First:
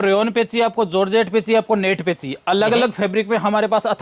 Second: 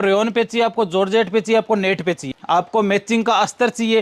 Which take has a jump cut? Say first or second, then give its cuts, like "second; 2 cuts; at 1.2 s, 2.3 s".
second; 1 cut; at 2.3 s